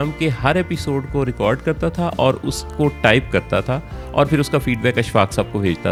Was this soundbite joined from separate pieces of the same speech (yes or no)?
no